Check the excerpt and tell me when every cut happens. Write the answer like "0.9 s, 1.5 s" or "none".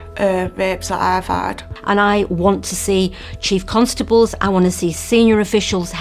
1.8 s